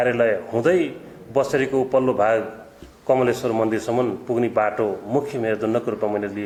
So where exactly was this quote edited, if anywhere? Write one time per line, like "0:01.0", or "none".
none